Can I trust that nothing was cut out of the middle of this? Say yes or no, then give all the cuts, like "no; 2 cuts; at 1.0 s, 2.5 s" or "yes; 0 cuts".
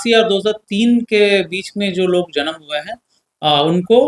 yes; 0 cuts